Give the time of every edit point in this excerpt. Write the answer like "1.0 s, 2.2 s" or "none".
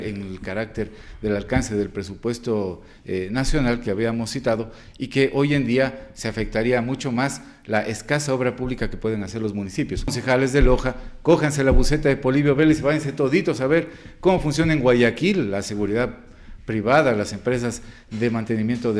10.1 s